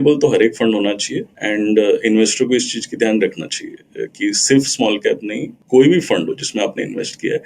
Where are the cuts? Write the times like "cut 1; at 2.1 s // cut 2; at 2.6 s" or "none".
none